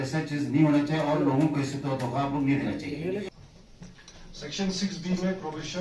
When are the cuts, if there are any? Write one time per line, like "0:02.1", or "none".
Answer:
0:03.3

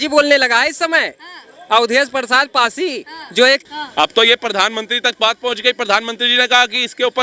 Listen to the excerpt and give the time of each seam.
0:03.6

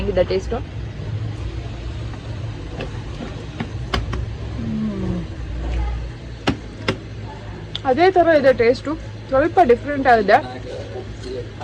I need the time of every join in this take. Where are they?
none

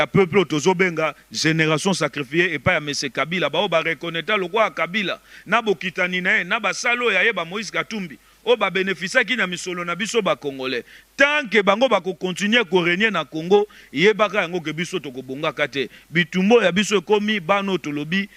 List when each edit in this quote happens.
none

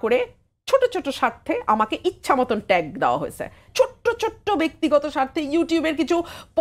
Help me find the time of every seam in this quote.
0:03.6

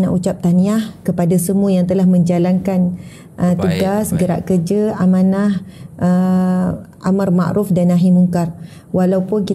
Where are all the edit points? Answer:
none

